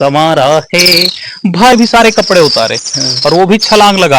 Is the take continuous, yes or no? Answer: no